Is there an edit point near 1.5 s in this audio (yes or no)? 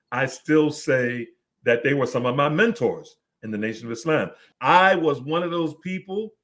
no